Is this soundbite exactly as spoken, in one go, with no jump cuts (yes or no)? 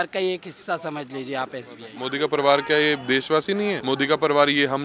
no